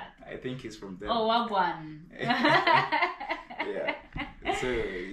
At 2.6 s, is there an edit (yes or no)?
no